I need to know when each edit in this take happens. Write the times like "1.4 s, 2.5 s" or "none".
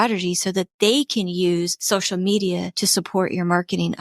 1.8 s, 2.8 s